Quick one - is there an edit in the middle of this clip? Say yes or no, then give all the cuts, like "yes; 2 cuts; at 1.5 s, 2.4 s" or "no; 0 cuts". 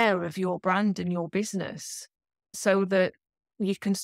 yes; 1 cut; at 2.6 s